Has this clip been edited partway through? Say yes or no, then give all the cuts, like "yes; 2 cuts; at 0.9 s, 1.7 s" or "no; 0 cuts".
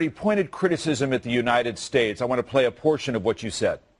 yes; 1 cut; at 1.1 s